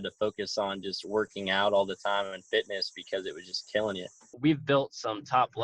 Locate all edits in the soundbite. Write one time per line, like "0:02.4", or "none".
0:04.2